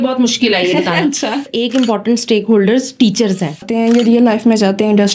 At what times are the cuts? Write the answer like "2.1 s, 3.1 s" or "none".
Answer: 1.5 s, 3.6 s

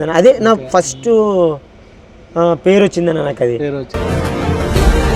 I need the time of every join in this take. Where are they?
3.8 s

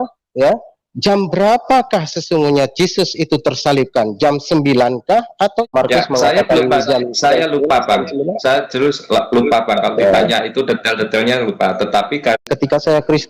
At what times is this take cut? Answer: 5.7 s, 12.5 s

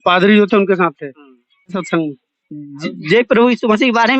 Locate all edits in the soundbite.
1.9 s

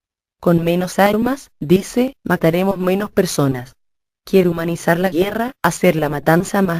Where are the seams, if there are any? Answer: 4.5 s

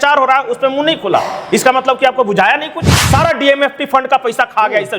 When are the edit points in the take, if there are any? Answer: 3.0 s

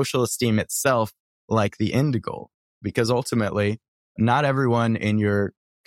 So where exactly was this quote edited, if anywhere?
2.8 s, 4.2 s

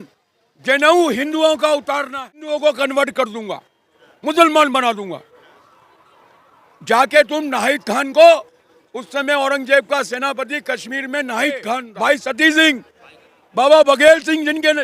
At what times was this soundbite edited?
2.4 s, 11.9 s

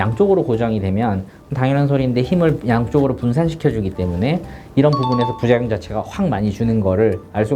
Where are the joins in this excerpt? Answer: none

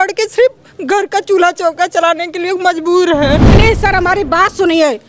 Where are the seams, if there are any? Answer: 3.5 s

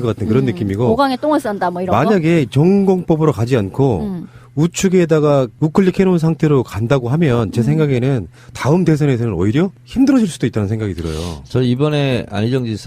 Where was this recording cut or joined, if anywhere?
8.3 s

